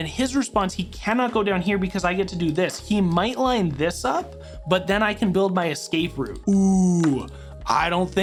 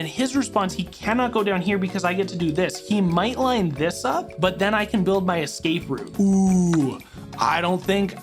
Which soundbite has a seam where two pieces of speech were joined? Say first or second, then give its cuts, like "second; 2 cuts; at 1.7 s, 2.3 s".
second; 1 cut; at 4.3 s